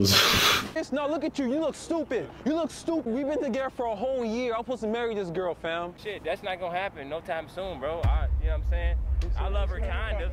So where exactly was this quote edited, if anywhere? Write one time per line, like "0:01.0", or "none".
0:00.8
0:03.0
0:06.0